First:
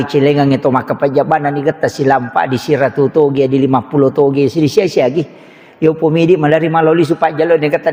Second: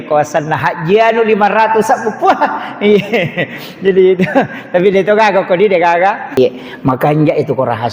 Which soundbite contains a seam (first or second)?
second